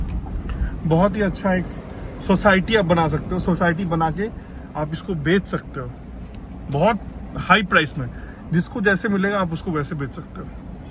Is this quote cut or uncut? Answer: uncut